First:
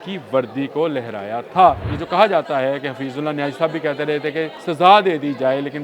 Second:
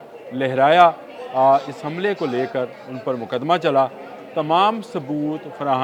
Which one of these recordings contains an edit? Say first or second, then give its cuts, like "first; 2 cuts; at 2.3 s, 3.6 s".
first; 2 cuts; at 1.9 s, 4.6 s